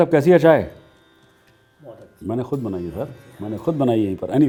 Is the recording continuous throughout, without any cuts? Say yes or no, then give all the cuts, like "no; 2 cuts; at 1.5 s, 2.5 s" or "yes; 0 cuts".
yes; 0 cuts